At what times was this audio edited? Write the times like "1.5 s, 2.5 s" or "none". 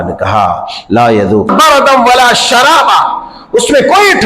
1.5 s